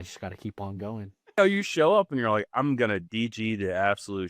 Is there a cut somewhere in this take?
yes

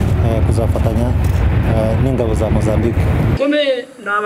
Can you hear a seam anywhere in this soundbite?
yes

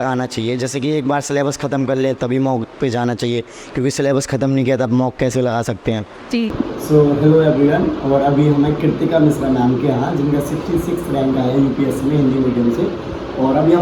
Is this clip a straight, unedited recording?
yes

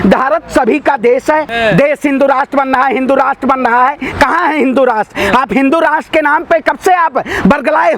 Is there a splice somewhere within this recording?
yes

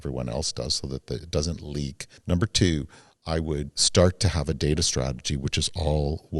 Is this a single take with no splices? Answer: no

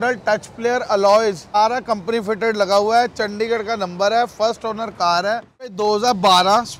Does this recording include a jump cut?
yes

